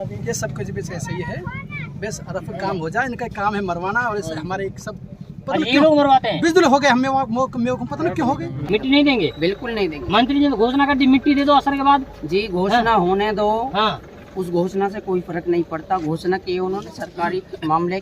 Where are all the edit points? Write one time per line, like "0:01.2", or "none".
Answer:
0:08.5

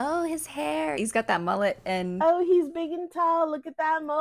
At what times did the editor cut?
0:01.0

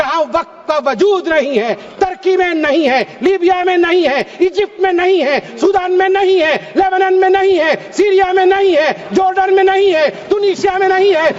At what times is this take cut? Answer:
none

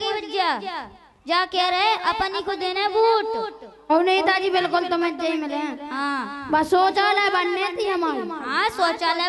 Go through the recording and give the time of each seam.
none

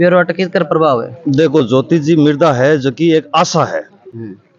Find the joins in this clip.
none

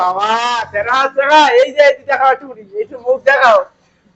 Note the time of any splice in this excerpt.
none

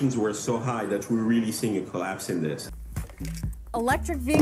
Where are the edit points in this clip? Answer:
0:02.6

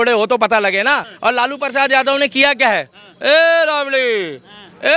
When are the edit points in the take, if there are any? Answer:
0:01.1

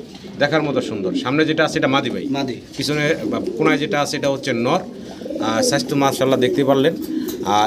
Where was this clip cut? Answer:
none

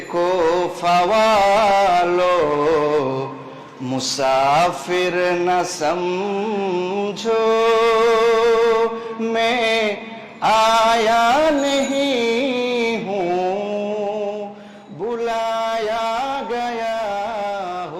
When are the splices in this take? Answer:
none

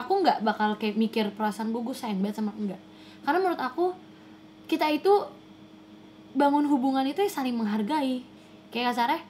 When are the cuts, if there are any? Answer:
0:08.4

